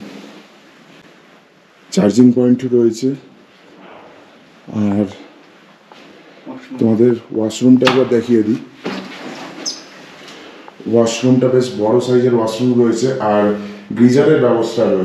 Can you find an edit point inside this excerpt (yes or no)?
no